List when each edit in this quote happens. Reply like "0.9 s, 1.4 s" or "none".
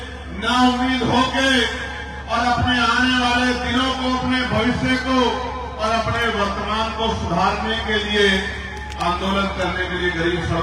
none

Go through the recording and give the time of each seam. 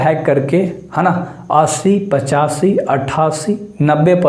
none

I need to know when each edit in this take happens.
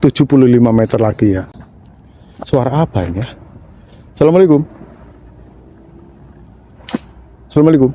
1.5 s

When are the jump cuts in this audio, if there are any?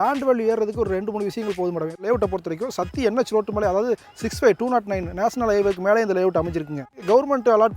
2.0 s, 6.9 s

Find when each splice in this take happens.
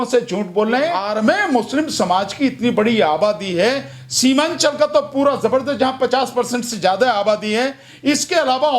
1.0 s

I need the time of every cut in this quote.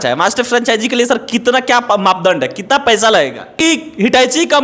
3.5 s

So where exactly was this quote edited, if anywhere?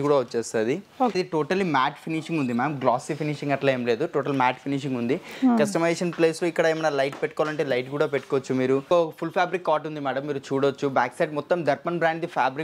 1.1 s, 8.9 s

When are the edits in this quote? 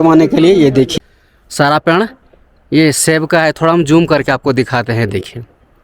0.9 s

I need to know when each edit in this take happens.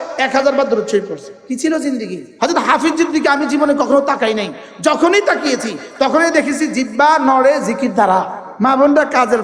1.3 s, 2.2 s, 8.4 s

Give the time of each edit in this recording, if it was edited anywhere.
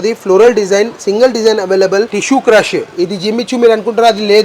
2.2 s

